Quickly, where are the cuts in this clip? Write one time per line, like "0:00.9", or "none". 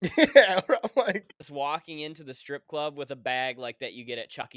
0:01.4